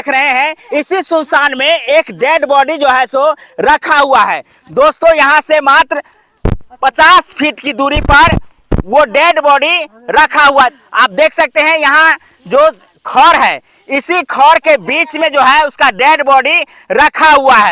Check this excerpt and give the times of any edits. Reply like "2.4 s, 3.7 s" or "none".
none